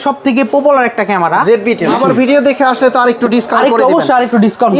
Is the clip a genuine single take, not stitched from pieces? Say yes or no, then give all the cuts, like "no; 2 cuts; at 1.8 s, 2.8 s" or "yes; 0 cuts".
no; 1 cut; at 1.9 s